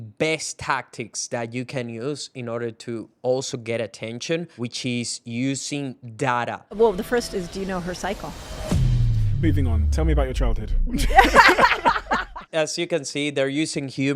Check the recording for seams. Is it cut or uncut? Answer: cut